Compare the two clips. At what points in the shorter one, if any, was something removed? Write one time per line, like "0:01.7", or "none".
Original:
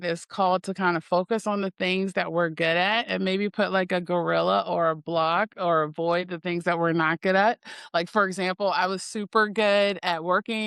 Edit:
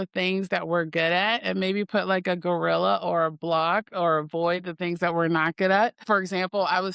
0:06.0